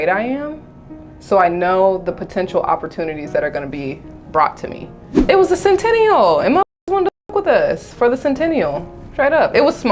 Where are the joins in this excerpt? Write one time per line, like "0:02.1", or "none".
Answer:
0:05.2